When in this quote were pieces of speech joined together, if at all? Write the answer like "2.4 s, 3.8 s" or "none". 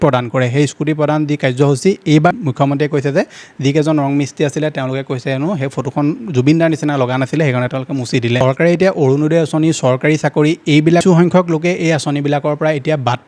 2.3 s, 8.4 s, 11.0 s